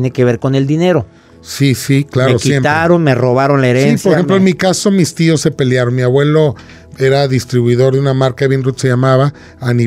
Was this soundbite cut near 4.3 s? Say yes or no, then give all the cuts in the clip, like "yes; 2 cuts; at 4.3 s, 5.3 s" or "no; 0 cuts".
no; 0 cuts